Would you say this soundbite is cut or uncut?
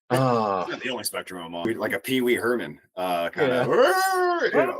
cut